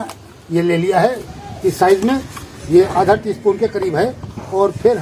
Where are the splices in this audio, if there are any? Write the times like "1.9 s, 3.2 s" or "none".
1.2 s

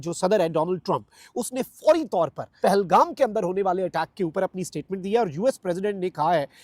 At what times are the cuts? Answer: 2.5 s

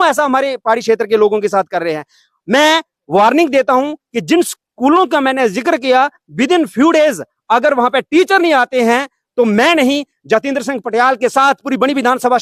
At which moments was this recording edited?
none

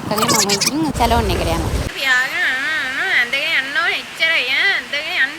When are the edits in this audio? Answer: 1.9 s

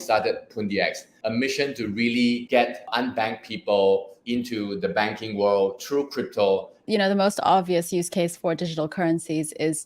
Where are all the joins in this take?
1.1 s, 2.8 s, 4.1 s, 6.8 s

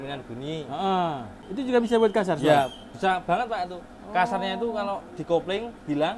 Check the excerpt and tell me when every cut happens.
1.4 s

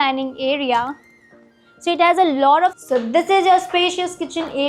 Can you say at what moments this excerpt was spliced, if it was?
2.8 s

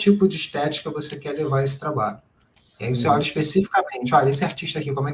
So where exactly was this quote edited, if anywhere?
none

